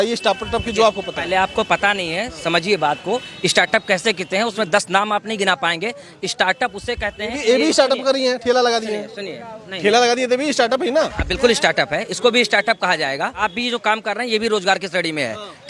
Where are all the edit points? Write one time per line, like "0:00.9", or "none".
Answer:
0:13.4

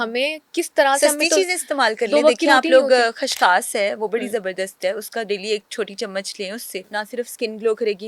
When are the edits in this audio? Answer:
0:06.9

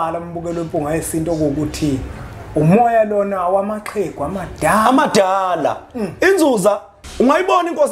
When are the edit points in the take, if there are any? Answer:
0:07.0

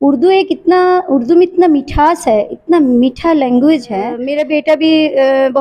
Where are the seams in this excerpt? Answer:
0:04.3

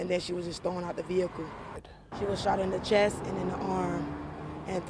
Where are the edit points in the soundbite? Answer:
0:01.8

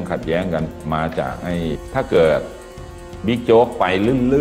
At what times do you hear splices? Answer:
0:01.8

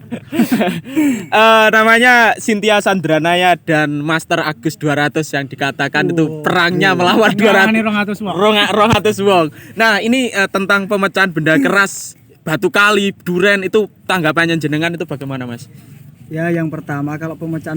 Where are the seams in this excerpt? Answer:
0:15.8

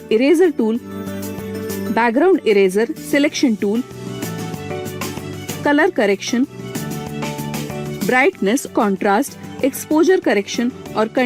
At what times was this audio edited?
none

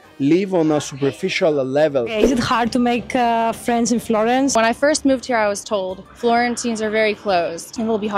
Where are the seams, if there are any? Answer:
none

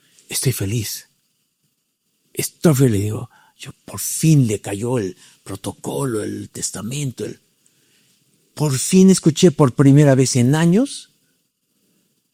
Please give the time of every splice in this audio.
none

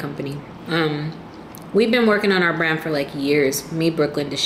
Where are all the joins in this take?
none

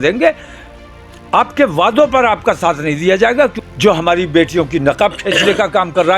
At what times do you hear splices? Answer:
0:03.6

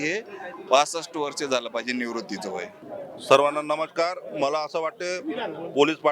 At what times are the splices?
none

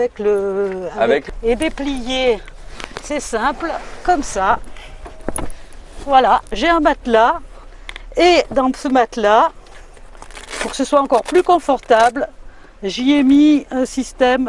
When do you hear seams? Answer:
0:01.3

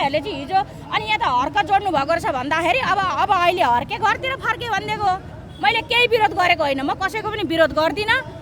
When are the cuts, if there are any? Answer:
none

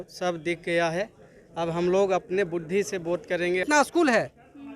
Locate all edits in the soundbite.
0:03.6

